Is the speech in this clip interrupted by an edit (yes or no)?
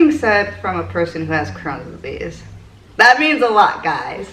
no